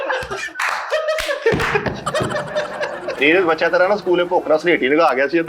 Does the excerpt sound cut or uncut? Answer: cut